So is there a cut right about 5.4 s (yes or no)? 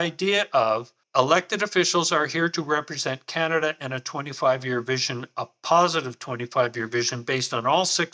no